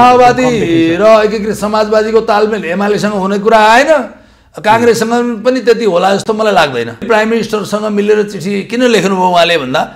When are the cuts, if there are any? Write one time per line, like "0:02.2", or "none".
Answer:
0:07.0